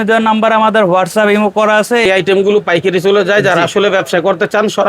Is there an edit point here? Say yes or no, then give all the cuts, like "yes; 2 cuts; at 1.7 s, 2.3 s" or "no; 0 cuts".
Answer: yes; 1 cut; at 2.1 s